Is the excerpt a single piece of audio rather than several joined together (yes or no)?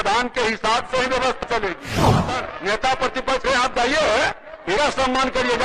no